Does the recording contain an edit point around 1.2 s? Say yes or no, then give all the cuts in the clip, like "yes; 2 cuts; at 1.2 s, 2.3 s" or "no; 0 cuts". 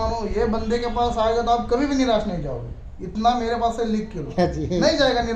no; 1 cut; at 4.3 s